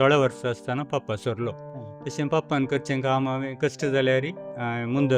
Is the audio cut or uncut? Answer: uncut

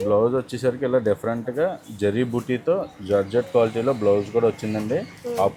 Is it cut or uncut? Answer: uncut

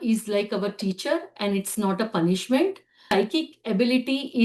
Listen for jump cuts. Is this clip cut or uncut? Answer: cut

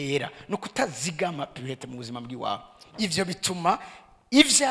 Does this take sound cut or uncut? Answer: uncut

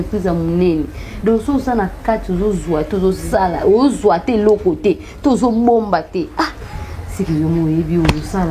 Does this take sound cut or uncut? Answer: uncut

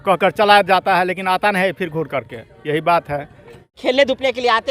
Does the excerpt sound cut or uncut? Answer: cut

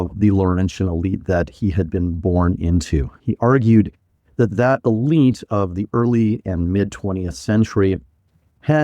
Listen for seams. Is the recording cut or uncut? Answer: cut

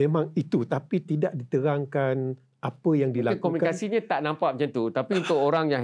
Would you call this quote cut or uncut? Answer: uncut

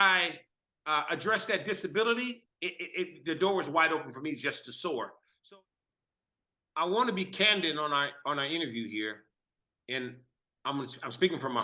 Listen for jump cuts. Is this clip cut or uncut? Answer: cut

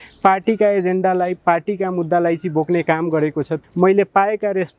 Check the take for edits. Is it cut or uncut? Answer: cut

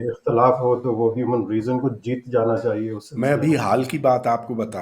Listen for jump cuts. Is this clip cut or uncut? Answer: cut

